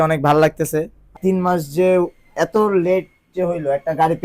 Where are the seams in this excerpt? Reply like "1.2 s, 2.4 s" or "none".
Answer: 1.1 s